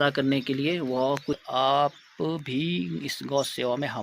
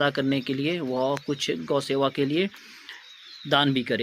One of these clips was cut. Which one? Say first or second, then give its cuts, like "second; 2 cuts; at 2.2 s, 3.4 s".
first; 1 cut; at 1.4 s